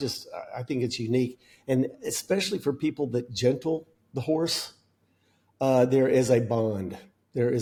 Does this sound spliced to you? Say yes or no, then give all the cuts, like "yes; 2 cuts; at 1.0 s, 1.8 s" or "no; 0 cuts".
no; 0 cuts